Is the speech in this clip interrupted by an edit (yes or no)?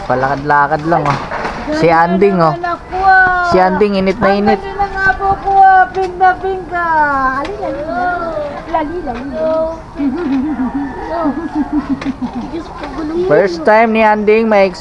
no